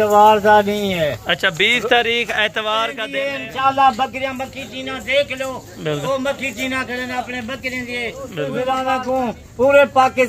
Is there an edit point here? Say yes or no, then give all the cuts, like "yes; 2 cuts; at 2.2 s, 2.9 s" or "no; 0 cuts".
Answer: yes; 2 cuts; at 3.0 s, 8.6 s